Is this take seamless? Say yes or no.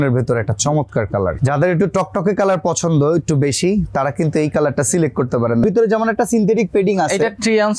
no